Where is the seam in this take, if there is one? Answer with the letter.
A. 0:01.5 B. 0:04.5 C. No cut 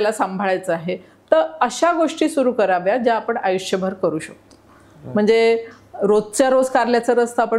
C